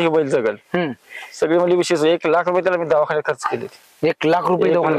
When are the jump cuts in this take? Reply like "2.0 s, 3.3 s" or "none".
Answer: none